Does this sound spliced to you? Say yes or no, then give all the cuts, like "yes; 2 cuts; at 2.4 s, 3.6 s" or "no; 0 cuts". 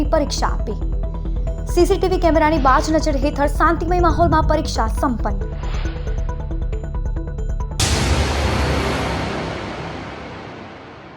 yes; 1 cut; at 7.6 s